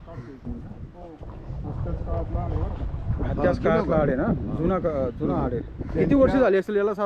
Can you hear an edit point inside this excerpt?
no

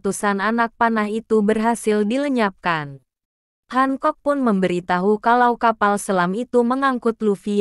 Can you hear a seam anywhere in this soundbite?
no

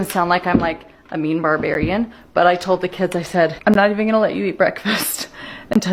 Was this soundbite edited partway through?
no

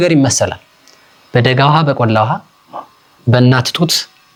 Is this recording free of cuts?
yes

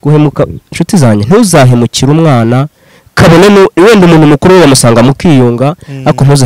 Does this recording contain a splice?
no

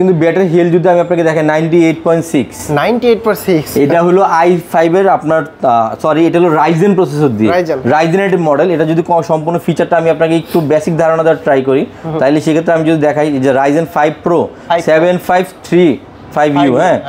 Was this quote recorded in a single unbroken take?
yes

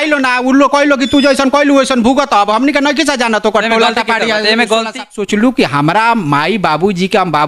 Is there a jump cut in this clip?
yes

